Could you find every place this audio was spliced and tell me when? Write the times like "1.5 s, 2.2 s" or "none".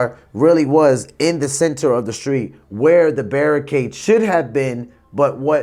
none